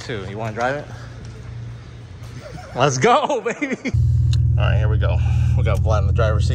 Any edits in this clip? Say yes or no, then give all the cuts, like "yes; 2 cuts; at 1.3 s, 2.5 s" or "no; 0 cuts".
yes; 1 cut; at 4.0 s